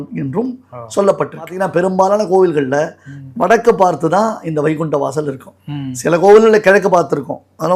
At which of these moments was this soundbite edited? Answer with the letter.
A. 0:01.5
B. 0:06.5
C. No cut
A